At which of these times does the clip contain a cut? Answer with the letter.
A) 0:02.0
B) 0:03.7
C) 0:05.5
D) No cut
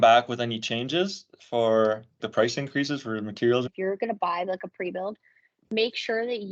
B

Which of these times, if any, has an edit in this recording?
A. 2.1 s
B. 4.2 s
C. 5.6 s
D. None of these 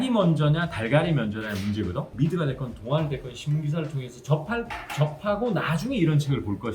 A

